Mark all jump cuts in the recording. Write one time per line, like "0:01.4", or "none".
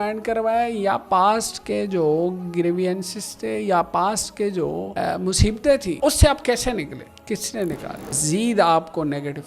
0:04.9
0:05.9
0:07.1
0:08.2